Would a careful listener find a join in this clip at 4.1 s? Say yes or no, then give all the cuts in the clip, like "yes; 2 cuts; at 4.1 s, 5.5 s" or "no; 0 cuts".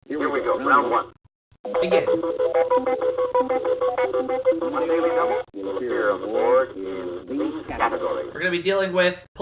no; 1 cut; at 8.1 s